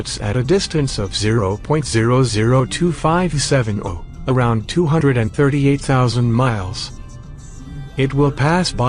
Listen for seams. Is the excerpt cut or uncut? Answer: cut